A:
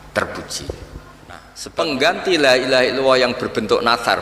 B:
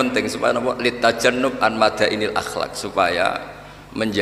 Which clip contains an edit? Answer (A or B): A